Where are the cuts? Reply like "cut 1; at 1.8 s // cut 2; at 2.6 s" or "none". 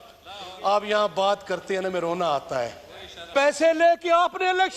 cut 1; at 3.3 s